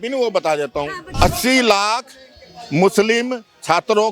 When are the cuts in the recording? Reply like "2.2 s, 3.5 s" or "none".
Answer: 1.0 s